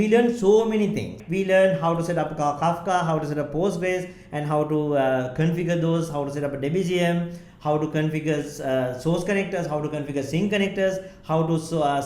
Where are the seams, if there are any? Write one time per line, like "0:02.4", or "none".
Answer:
0:01.2